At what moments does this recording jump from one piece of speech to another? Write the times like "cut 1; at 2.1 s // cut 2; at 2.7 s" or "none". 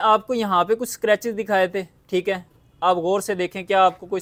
none

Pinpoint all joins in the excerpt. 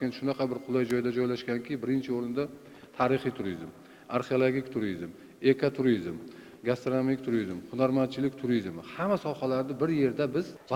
none

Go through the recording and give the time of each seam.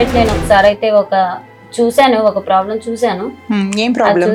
none

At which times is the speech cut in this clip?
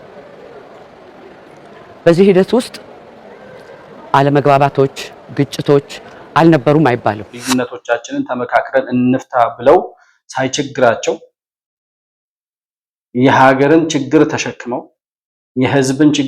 cut 1; at 7.3 s

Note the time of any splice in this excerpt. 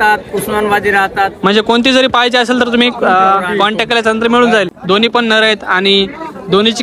cut 1; at 4.8 s

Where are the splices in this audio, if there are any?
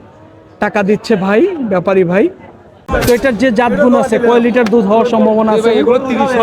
cut 1; at 2.8 s

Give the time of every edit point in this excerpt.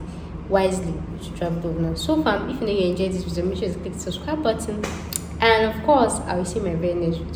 none

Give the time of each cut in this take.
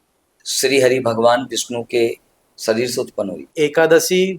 cut 1; at 3.5 s

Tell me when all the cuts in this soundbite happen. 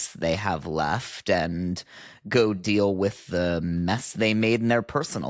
none

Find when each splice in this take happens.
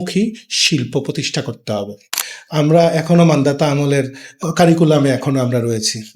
cut 1; at 2.1 s // cut 2; at 4.3 s

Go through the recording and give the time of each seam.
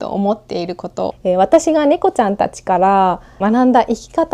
cut 1; at 1.1 s // cut 2; at 3.4 s

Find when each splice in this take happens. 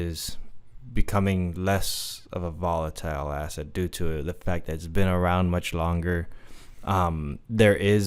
none

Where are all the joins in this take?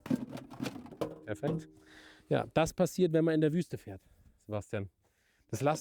none

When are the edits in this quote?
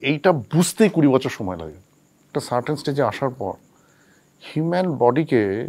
cut 1; at 2.3 s

